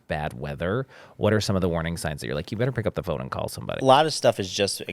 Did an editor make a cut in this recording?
yes; 1 cut; at 3.8 s

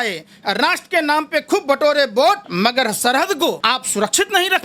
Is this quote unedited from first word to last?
no; 2 cuts; at 2.5 s, 3.6 s

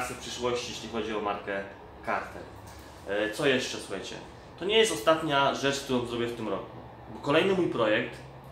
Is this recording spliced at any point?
no; 0 cuts

